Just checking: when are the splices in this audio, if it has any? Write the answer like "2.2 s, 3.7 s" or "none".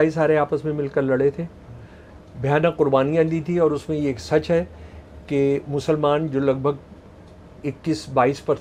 none